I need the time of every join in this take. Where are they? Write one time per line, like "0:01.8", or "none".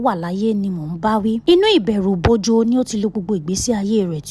0:01.4